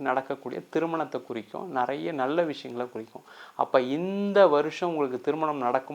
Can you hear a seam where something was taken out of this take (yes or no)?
no